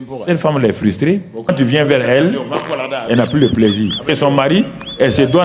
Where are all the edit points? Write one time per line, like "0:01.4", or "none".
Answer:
0:01.5
0:04.1